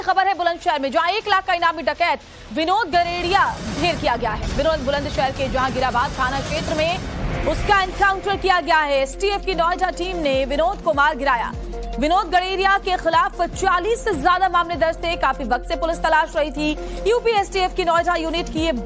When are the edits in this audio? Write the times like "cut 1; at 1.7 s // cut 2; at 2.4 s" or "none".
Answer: none